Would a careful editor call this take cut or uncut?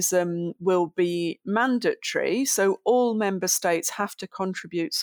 uncut